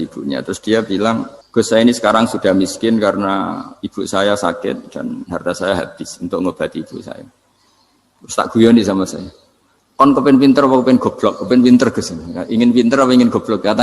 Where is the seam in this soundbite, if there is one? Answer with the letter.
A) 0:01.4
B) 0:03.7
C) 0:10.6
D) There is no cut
A